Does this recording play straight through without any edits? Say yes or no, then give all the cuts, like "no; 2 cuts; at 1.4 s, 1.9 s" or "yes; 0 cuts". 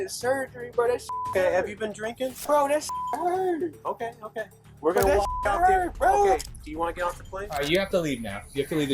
no; 2 cuts; at 2.4 s, 7.5 s